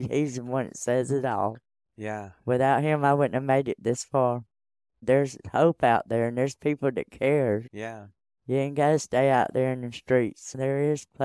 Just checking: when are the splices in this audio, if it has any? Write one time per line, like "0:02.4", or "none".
0:04.9